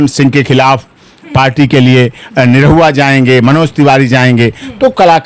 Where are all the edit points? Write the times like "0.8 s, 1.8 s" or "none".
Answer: none